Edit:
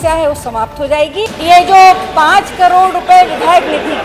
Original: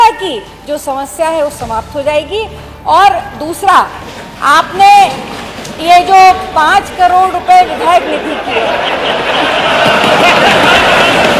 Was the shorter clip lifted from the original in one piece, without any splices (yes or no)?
no